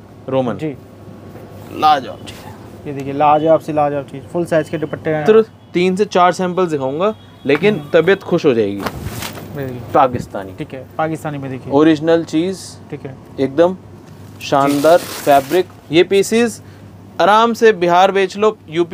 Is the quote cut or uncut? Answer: cut